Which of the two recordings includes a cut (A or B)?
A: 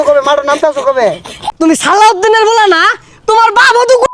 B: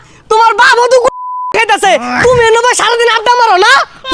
A